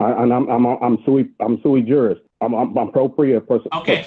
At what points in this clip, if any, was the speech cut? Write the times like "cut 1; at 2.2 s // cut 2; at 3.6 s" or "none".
cut 1; at 2.3 s